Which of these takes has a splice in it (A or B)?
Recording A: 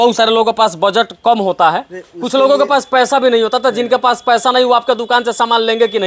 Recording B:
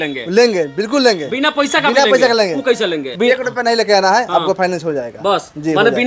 B